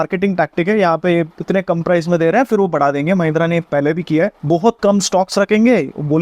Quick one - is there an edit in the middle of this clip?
yes; 1 cut; at 4.4 s

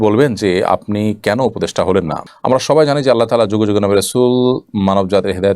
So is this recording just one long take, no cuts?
no; 1 cut; at 2.2 s

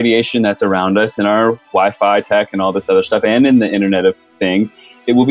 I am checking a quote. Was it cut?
no; 0 cuts

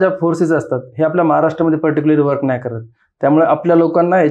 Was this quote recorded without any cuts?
yes; 0 cuts

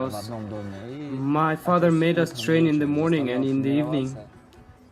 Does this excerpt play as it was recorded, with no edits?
no; 1 cut; at 1.6 s

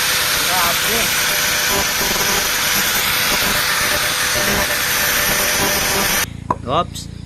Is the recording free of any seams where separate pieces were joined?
no; 1 cut; at 6.2 s

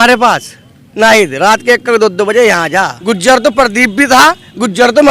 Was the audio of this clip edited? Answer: yes; 1 cut; at 2.9 s

